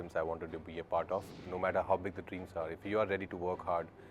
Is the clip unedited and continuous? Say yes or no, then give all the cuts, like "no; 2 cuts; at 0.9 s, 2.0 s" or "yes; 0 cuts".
no; 1 cut; at 1.5 s